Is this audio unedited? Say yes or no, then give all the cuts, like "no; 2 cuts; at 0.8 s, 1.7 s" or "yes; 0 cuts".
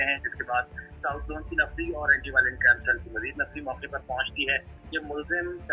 yes; 0 cuts